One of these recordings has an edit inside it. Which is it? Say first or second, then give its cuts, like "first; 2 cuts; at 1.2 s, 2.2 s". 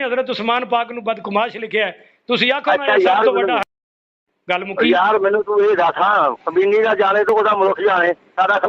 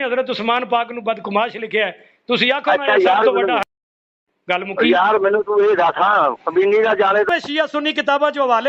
second; 1 cut; at 7.3 s